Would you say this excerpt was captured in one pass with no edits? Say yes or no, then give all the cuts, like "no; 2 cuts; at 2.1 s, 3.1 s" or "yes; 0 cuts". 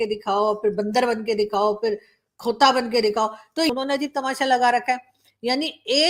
yes; 0 cuts